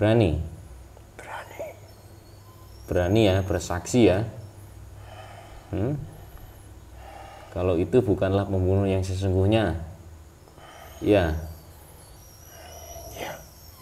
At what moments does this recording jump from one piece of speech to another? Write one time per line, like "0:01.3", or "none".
none